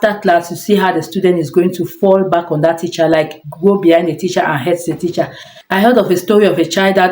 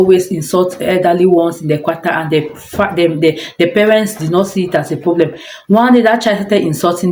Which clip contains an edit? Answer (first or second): first